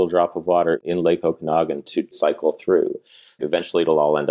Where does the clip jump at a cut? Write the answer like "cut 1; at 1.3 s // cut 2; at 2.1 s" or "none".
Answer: cut 1; at 0.8 s // cut 2; at 2.2 s // cut 3; at 3.4 s

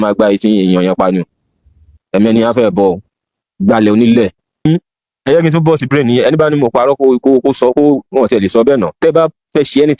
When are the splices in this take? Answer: cut 1; at 4.6 s

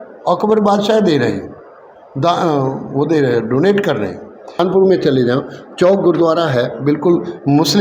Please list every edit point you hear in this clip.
cut 1; at 4.6 s

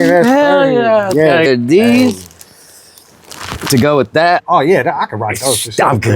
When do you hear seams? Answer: cut 1; at 1.5 s // cut 2; at 4.4 s

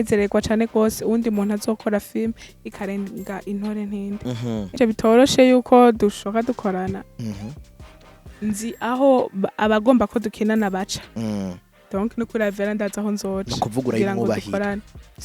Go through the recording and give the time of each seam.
cut 1; at 4.8 s

